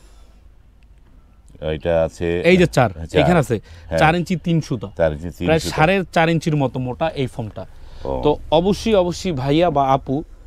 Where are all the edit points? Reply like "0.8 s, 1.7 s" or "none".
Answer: none